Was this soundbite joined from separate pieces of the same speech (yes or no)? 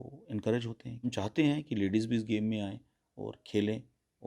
yes